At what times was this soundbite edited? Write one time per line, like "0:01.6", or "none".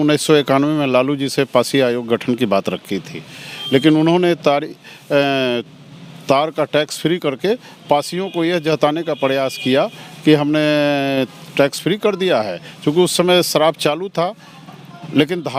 none